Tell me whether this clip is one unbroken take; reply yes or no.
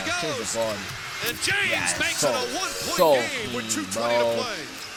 yes